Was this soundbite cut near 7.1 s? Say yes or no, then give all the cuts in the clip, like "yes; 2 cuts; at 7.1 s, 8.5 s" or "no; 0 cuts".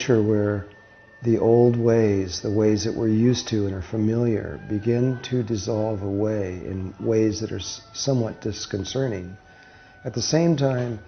no; 1 cut; at 5.3 s